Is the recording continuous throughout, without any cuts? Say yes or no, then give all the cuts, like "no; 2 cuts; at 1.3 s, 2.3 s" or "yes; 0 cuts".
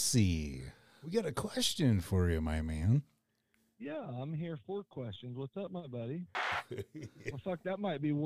no; 1 cut; at 6.4 s